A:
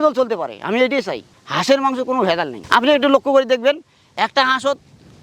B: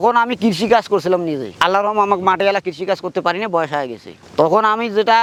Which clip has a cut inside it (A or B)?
A